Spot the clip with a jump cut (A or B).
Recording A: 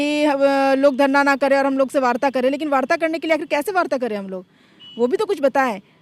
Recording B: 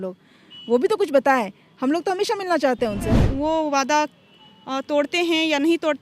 B